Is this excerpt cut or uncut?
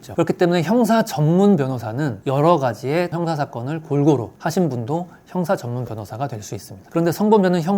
cut